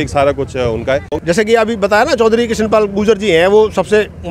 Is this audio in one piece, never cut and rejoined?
no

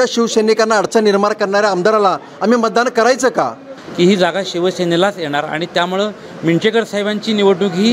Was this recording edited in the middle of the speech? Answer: yes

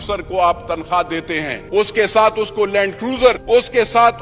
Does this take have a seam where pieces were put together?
yes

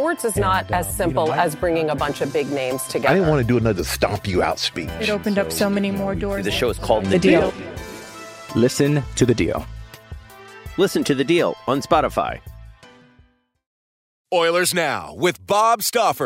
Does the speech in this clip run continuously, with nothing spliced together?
no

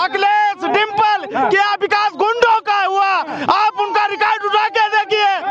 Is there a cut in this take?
no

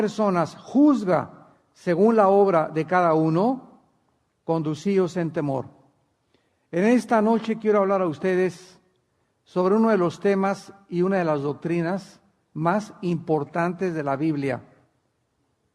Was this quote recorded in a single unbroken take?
no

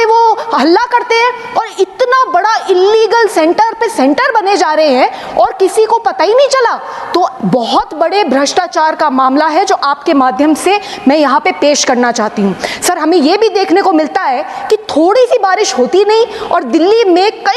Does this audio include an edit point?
no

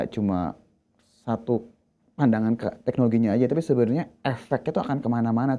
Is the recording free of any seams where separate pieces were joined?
yes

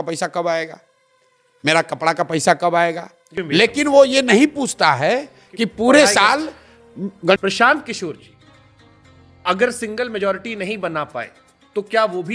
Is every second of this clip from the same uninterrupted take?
no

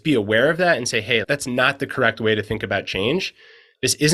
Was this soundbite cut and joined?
yes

